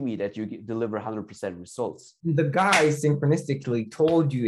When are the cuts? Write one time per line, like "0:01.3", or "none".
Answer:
0:02.1